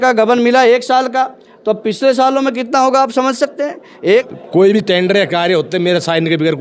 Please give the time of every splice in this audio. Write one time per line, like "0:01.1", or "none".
0:04.3